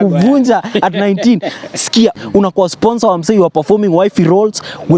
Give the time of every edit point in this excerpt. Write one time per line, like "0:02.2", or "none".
0:02.1